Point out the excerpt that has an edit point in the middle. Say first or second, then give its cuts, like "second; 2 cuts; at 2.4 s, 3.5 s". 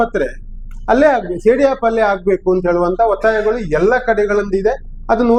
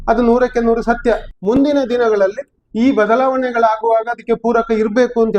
second; 1 cut; at 1.3 s